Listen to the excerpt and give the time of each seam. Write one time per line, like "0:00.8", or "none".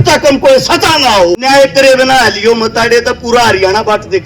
0:01.4